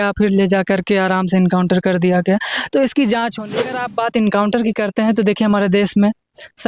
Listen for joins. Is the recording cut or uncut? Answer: cut